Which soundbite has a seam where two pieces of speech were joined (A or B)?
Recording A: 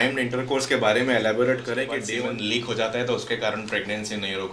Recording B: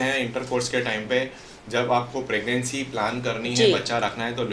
A